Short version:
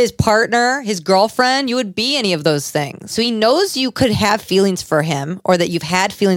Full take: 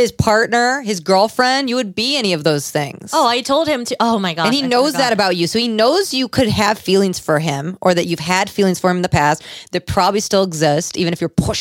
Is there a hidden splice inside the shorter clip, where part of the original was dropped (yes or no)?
yes